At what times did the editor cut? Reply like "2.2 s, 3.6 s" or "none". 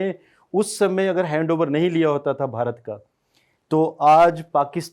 none